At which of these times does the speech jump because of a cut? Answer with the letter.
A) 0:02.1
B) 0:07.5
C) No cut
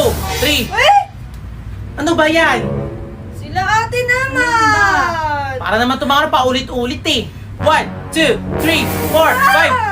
B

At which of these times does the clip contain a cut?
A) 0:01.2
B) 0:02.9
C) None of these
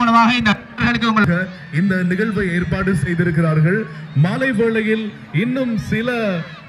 A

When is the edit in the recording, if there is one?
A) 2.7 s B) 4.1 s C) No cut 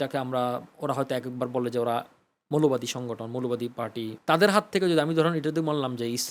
B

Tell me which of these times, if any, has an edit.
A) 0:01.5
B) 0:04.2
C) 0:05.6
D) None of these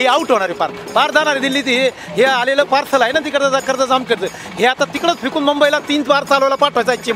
D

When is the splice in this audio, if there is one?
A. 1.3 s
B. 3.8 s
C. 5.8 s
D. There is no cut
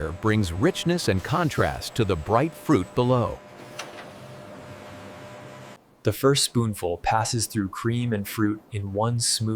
C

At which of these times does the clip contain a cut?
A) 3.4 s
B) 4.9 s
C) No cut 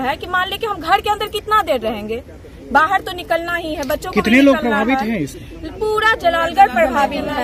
C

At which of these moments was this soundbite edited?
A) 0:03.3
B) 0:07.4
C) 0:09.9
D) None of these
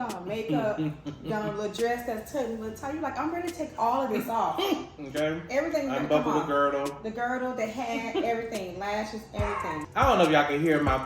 C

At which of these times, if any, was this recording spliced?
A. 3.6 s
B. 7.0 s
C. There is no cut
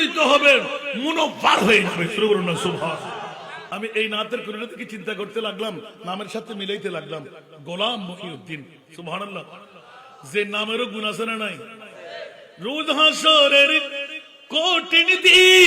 A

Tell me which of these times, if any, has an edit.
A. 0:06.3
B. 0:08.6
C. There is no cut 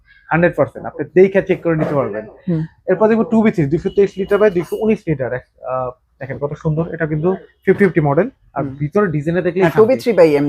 C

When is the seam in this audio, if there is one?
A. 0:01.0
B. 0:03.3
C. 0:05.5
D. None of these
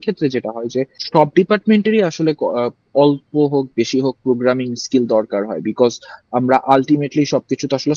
A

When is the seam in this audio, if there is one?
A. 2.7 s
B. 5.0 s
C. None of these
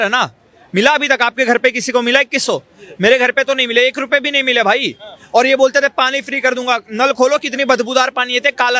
C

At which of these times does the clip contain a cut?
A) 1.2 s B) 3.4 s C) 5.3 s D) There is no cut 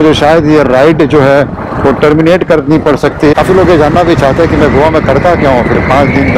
B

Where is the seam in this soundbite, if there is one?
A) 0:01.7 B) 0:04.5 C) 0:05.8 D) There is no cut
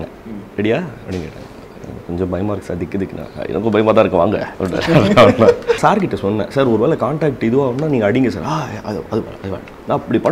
C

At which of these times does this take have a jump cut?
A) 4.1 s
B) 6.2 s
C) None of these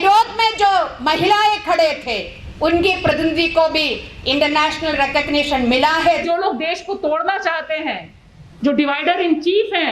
B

